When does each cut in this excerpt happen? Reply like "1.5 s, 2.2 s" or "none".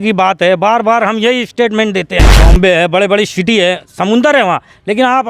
2.4 s

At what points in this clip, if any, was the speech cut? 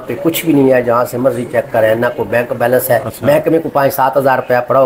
none

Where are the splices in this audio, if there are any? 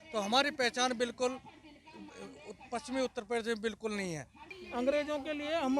4.4 s

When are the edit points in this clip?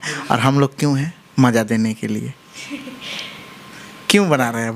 none

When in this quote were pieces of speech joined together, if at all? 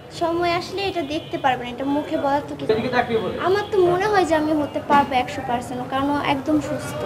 none

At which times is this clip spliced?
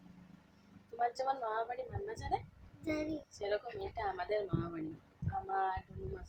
none

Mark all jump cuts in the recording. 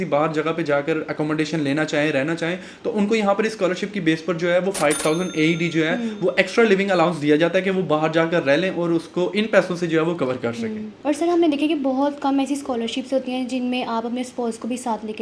none

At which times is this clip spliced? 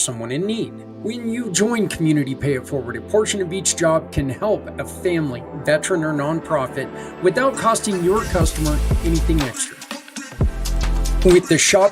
10.8 s

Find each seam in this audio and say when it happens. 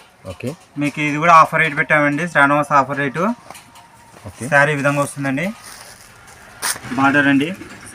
6.8 s

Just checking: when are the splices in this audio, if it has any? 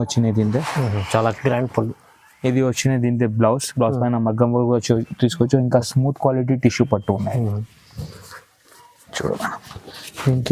none

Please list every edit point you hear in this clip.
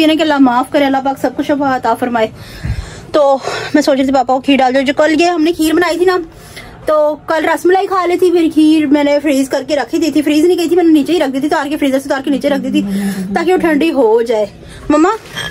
none

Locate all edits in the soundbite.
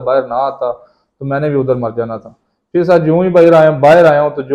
none

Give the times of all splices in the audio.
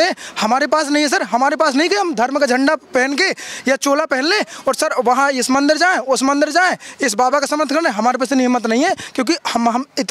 none

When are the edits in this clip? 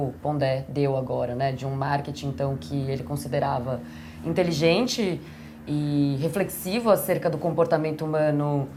none

